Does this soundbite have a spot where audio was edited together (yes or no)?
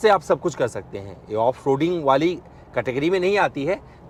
no